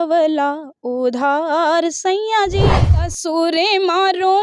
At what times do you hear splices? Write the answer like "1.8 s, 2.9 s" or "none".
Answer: 3.0 s